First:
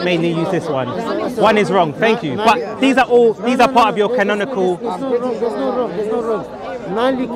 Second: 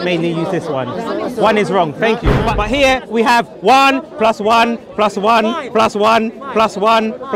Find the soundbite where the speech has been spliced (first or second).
second